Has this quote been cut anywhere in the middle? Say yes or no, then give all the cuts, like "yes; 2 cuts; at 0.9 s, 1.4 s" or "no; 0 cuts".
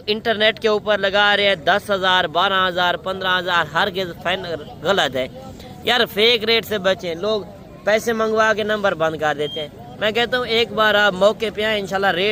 no; 0 cuts